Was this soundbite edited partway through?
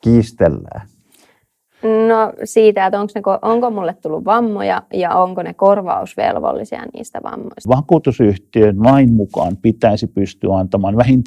yes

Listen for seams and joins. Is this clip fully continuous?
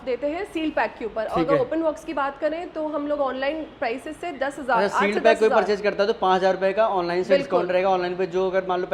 yes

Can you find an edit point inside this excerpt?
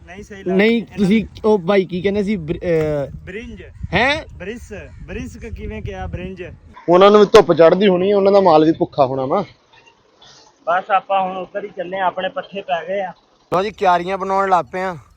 yes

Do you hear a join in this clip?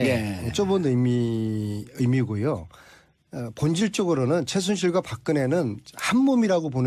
no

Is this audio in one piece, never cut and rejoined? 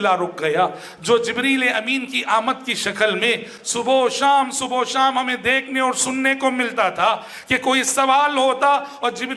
yes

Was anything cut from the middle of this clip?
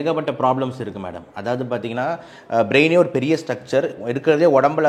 no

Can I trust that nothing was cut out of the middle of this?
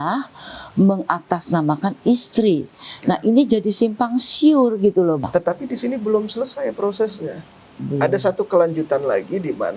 no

